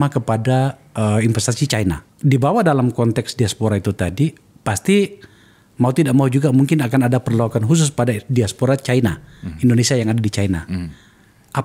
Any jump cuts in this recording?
yes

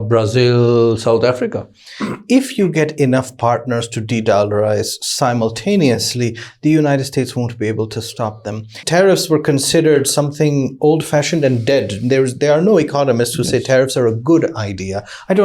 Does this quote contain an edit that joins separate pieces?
yes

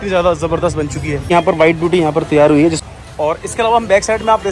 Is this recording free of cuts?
no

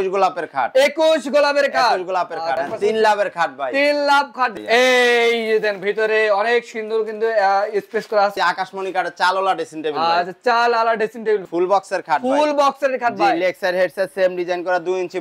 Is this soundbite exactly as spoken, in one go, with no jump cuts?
no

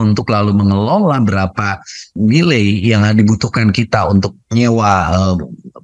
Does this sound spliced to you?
yes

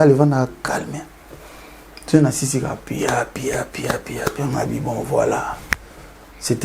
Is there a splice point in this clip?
no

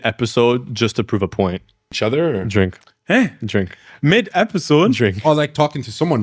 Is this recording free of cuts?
no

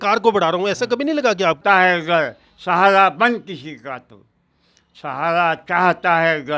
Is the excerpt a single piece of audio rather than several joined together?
no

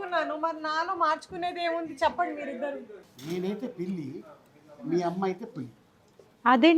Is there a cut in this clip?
yes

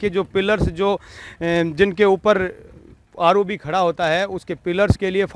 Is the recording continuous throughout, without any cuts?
yes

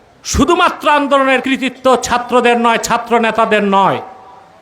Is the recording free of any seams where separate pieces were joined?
no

